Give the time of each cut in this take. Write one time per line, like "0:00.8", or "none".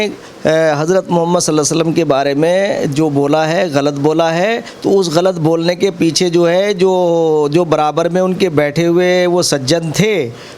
none